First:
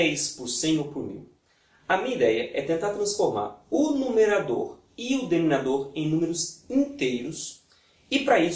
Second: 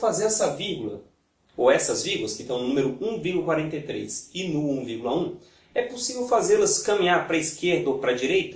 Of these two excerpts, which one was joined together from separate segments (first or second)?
first